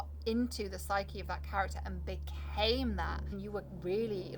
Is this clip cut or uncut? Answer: cut